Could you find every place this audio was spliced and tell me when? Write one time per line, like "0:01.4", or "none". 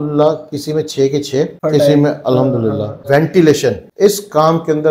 0:01.6
0:03.0
0:03.9

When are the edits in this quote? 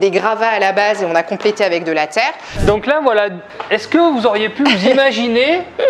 0:02.5

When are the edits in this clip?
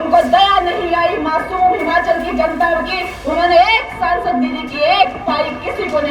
none

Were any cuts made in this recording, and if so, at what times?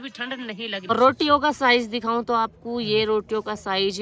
0:00.9

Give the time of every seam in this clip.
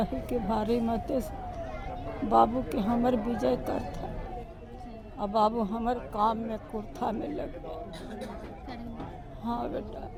none

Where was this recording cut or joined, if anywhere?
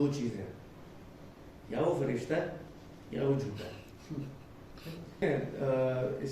0:05.2

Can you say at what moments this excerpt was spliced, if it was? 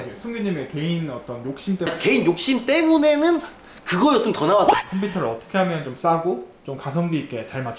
0:01.9
0:04.7

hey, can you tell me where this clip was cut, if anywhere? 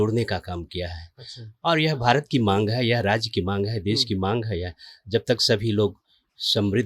none

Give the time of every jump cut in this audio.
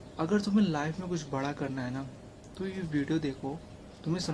none

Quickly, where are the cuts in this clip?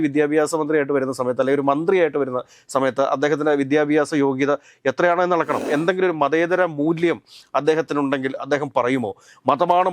0:05.7

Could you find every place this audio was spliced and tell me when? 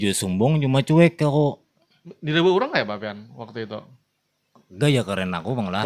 none

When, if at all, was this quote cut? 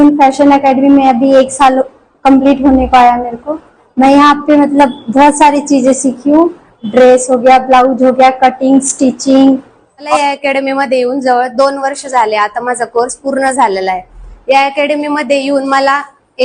0:03.7
0:10.1

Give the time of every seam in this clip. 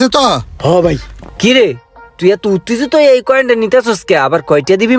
0:01.1

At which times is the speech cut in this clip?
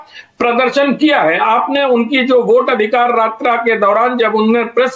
none

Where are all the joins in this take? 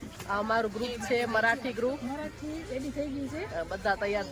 none

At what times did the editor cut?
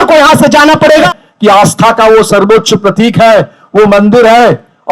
0:01.1

